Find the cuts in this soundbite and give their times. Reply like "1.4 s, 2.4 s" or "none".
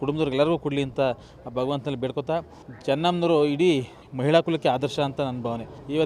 none